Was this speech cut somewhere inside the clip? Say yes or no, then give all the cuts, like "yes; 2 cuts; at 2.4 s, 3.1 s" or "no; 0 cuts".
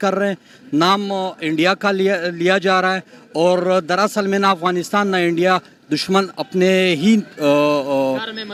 no; 0 cuts